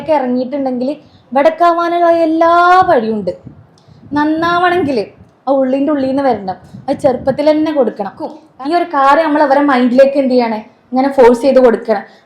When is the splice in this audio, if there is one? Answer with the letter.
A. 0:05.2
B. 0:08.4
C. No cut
B